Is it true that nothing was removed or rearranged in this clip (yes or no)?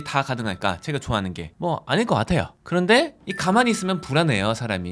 no